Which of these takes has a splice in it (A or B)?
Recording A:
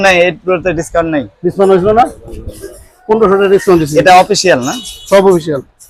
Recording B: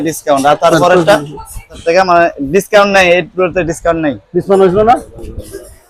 B